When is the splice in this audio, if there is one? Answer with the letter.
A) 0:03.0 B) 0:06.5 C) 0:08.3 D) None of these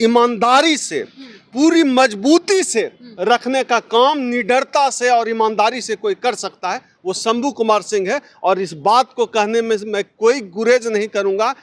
D